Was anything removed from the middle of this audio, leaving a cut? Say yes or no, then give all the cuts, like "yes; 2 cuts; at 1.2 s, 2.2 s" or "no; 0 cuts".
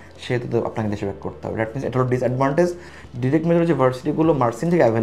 yes; 1 cut; at 2.9 s